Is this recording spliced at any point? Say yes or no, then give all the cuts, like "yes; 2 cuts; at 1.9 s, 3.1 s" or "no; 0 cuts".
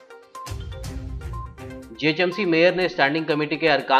no; 0 cuts